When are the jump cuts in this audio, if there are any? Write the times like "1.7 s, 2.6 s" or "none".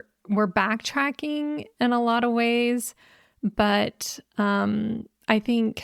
none